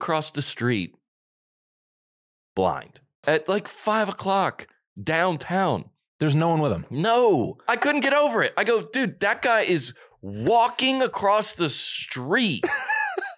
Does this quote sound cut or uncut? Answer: cut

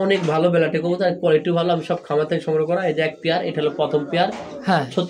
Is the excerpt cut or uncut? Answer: uncut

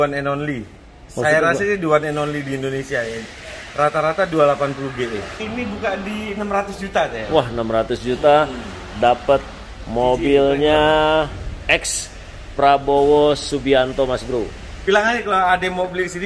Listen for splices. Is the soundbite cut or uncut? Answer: cut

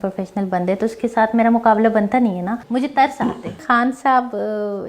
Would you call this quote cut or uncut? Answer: cut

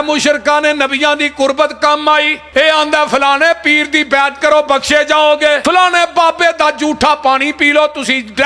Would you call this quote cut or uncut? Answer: cut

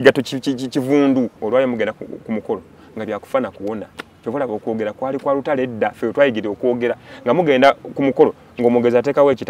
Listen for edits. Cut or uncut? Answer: cut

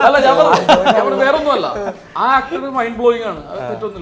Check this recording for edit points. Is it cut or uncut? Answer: uncut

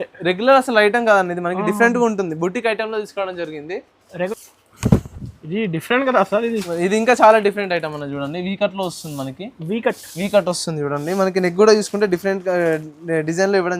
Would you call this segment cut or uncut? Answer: cut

